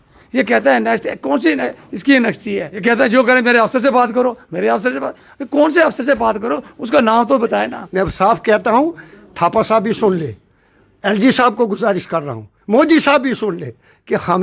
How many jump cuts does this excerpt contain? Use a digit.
2